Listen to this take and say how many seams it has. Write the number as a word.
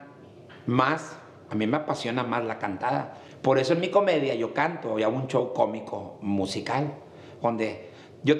one